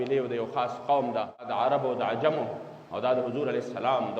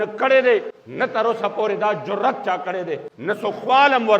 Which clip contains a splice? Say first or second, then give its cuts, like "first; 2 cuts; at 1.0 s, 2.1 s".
first; 1 cut; at 1.5 s